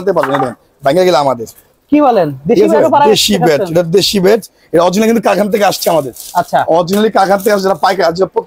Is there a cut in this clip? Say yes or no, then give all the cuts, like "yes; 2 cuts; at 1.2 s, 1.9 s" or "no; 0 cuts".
no; 0 cuts